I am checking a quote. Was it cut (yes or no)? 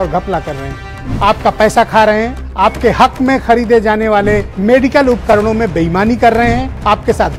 no